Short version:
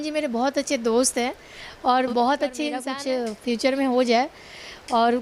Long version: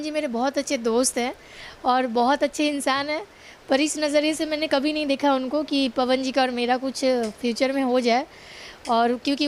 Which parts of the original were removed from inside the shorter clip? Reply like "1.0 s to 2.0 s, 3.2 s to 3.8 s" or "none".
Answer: 2.9 s to 6.9 s